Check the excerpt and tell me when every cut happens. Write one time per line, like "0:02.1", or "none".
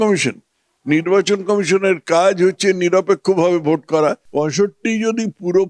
0:04.2